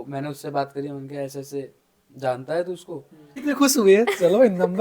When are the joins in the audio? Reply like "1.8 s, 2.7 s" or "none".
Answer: 3.3 s